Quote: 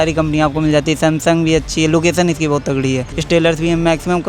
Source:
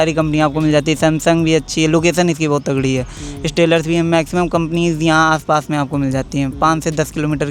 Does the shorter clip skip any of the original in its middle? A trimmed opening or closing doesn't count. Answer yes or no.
yes